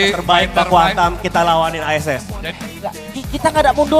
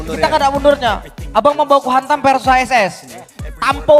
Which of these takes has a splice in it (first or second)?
first